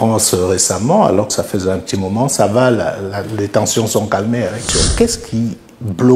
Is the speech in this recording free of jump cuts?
no; 1 cut; at 4.6 s

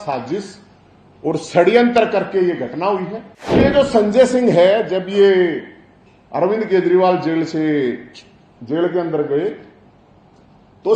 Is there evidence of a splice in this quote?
yes; 1 cut; at 3.6 s

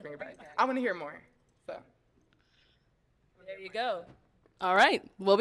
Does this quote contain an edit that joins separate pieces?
no; 0 cuts

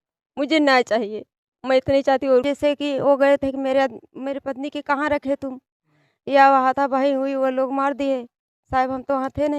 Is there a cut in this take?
yes; 1 cut; at 2.5 s

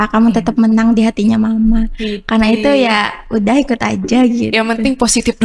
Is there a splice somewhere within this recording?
no; 0 cuts

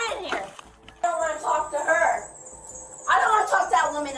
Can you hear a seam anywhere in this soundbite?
yes; 1 cut; at 1.0 s

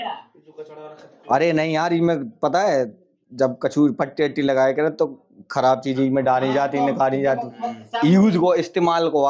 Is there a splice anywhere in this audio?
no; 0 cuts

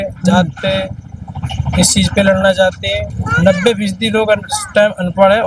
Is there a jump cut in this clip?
yes; 1 cut; at 3.1 s

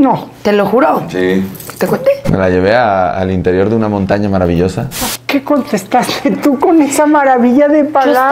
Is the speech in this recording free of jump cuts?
no; 1 cut; at 4.9 s

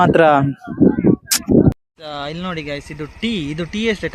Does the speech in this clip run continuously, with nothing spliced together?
no; 1 cut; at 1.8 s

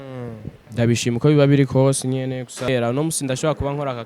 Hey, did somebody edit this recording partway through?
yes; 1 cut; at 2.7 s

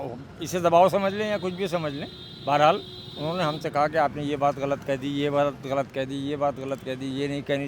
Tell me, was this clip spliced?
no; 0 cuts

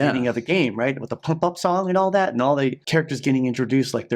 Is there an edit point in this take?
yes; 1 cut; at 2.9 s

